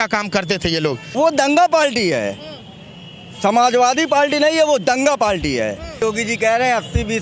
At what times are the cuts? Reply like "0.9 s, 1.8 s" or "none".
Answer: 1.0 s, 6.0 s